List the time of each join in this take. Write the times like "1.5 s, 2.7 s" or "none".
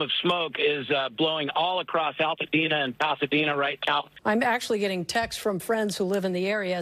none